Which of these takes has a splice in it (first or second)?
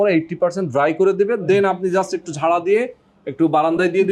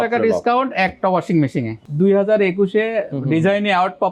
second